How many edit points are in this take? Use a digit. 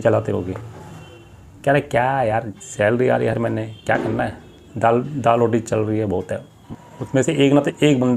1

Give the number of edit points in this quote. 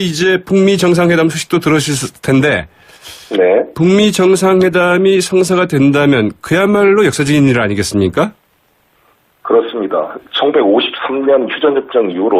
1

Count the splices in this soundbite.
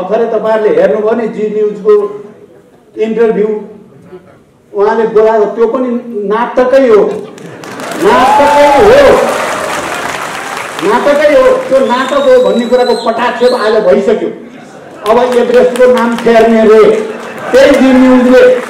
0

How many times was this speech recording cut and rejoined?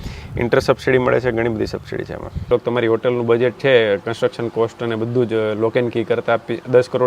1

